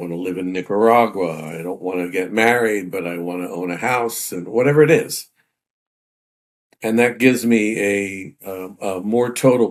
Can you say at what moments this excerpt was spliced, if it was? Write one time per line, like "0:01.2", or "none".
none

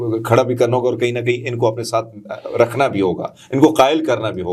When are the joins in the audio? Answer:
none

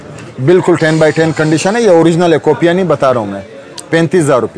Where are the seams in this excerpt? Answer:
none

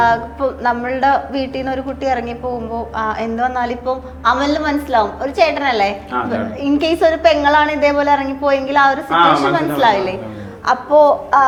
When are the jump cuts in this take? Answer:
none

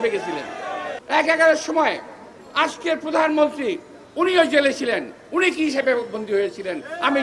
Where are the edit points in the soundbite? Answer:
0:00.9

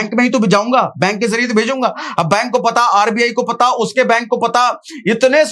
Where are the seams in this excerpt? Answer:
none

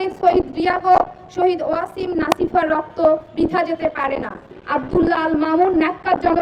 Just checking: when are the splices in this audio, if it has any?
0:04.6

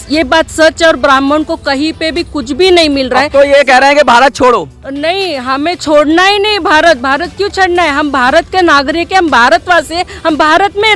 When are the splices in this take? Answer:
none

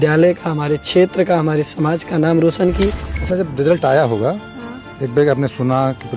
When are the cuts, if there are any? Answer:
0:03.1

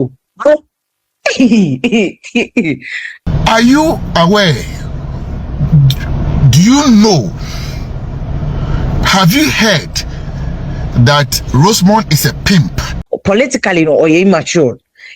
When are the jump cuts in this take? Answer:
0:03.2
0:12.9

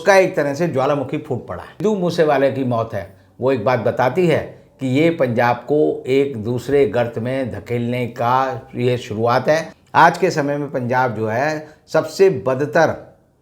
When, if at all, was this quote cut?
0:01.7
0:09.8

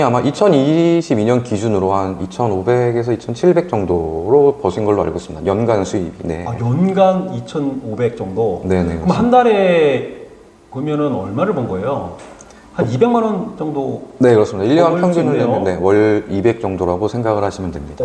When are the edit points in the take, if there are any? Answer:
none

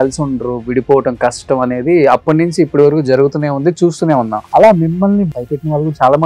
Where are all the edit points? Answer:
0:04.4
0:05.3

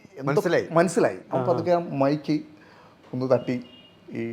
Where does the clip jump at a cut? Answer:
0:01.2

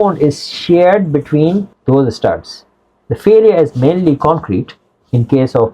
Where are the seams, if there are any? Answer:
0:01.7

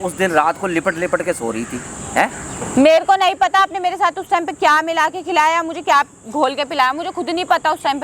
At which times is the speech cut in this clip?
none

